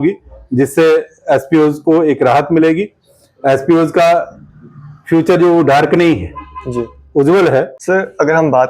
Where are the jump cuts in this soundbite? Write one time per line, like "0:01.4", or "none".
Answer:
0:07.8